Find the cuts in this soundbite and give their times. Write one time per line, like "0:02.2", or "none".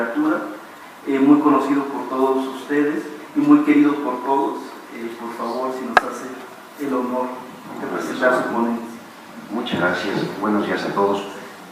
none